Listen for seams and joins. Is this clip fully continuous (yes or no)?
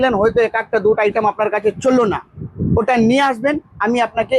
yes